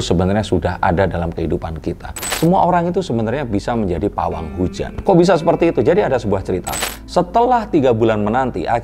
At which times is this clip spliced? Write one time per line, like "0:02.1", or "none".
0:02.3
0:06.7